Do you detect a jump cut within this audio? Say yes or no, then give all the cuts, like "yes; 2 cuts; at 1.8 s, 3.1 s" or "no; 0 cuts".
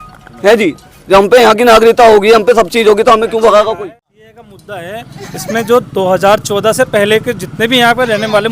yes; 1 cut; at 3.8 s